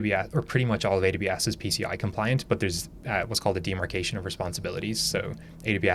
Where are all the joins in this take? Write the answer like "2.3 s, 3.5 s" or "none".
none